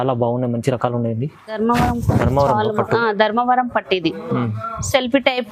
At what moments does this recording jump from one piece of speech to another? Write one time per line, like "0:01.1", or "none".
0:01.6